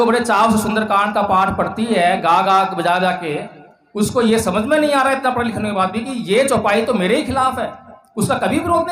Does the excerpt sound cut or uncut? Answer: uncut